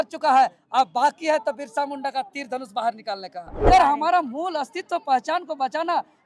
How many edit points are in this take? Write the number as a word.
one